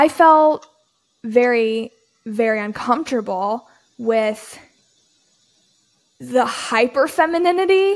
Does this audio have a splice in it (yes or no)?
no